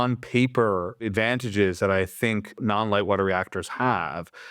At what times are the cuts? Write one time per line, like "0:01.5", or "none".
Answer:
0:01.1
0:02.6